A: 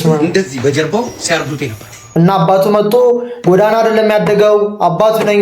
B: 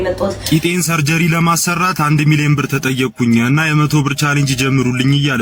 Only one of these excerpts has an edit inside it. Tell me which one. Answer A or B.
A